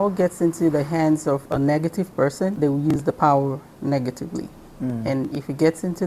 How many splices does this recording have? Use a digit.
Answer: 1